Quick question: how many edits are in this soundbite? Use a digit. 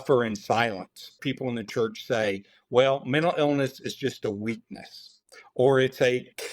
1